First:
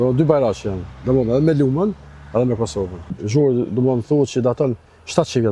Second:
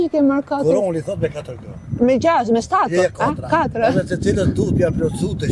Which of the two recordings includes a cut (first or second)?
first